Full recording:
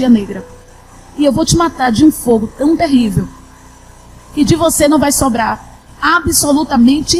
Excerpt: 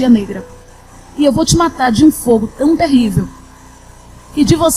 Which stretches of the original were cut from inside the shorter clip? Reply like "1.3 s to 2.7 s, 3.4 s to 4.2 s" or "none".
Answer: none